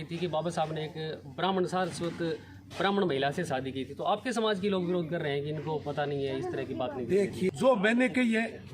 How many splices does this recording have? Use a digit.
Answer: 1